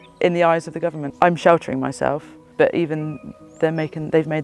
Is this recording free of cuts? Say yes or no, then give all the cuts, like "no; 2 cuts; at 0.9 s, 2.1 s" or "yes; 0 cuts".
no; 2 cuts; at 1.0 s, 2.4 s